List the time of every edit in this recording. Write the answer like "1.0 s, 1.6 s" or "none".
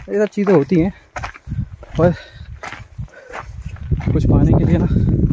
none

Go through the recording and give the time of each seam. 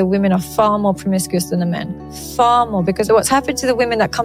3.1 s

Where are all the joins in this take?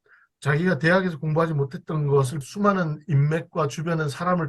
2.5 s

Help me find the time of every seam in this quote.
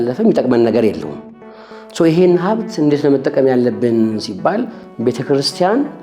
none

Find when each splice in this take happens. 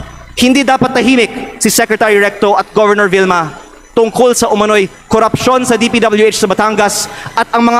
none

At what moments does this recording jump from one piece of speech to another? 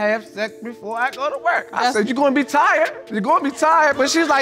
none

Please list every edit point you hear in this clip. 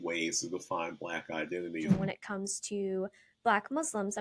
1.9 s

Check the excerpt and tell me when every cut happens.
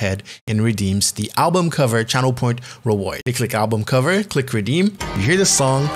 3.2 s

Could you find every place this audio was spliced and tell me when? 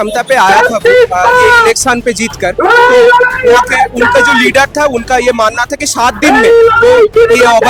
none

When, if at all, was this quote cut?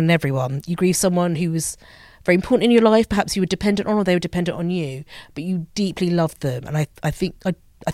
none

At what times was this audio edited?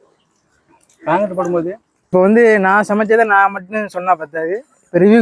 2.1 s

